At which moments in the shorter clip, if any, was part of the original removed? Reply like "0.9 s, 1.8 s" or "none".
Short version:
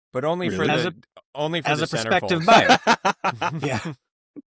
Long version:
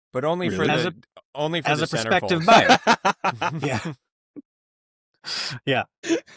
none

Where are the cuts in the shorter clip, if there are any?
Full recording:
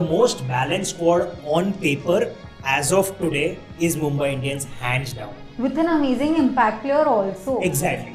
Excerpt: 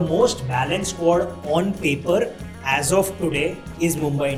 none

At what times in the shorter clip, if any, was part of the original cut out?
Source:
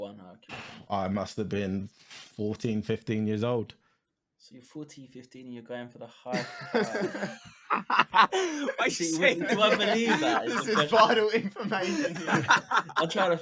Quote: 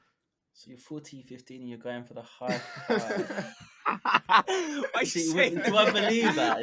none

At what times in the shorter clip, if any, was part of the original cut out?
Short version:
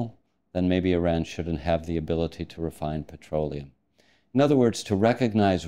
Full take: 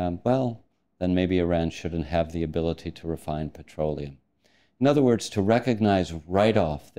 none

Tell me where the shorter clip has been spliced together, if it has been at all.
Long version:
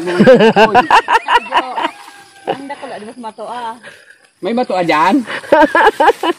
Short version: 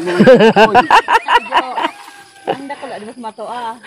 none

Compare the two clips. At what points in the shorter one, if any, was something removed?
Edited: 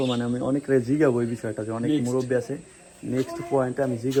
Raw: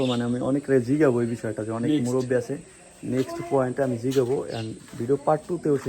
none

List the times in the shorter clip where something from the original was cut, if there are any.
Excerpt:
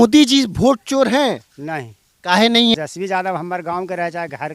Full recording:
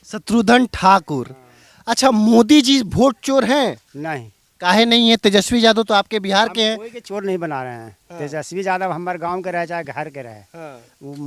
2.7 s

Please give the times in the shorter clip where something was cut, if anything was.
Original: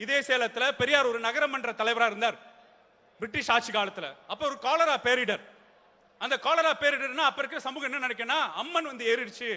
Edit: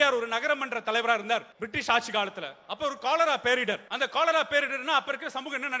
1.6 s, 3.9 s

